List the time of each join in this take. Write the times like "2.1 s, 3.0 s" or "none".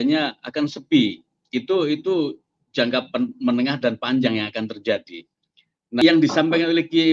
6.0 s